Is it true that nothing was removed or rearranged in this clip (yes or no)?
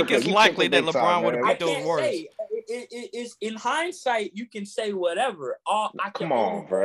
yes